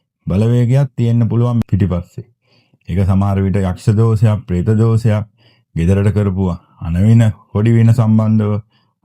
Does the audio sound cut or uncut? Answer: cut